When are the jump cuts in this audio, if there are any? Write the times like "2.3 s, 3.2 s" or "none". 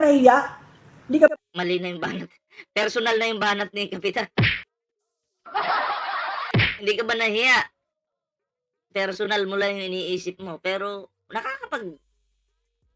none